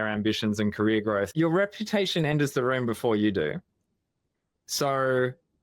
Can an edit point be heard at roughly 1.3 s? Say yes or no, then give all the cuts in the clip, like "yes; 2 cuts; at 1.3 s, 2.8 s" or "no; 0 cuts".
yes; 1 cut; at 1.3 s